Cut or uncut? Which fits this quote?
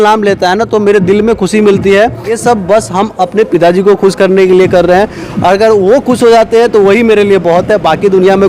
cut